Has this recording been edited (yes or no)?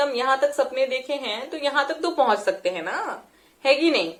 no